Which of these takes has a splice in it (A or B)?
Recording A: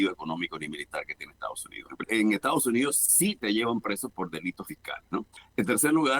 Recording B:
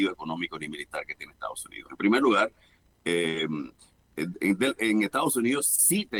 A